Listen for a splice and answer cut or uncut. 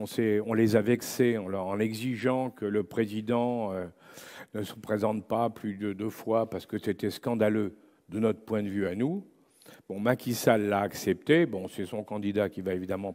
uncut